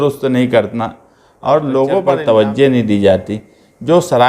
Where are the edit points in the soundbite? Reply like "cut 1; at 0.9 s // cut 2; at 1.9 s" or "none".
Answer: cut 1; at 2.1 s